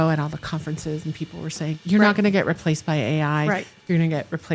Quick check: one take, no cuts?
no; 1 cut; at 1.8 s

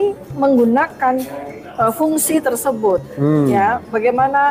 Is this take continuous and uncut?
yes; 0 cuts

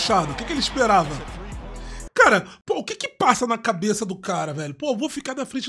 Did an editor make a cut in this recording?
yes; 1 cut; at 2.5 s

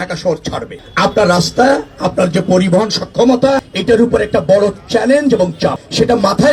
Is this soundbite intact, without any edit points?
yes; 0 cuts

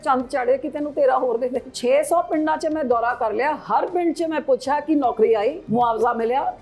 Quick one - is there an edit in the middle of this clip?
yes; 2 cuts; at 1.7 s, 5.6 s

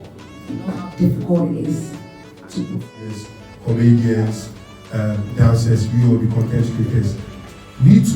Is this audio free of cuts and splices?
no; 1 cut; at 3.2 s

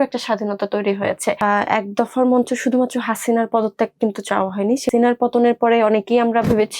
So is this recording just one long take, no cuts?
no; 2 cuts; at 1.4 s, 4.9 s

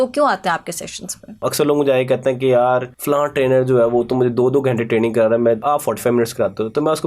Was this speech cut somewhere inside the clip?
yes; 3 cuts; at 1.5 s, 2.9 s, 5.6 s

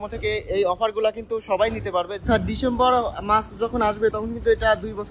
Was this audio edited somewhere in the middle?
yes; 1 cut; at 2.2 s

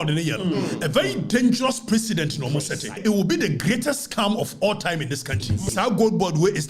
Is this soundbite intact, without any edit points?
no; 2 cuts; at 2.9 s, 5.7 s

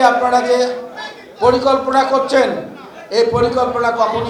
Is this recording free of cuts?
yes; 0 cuts

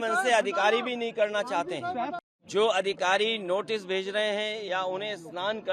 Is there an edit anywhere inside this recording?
yes; 1 cut; at 2.2 s

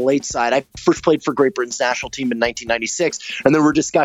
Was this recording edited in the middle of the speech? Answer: no; 0 cuts

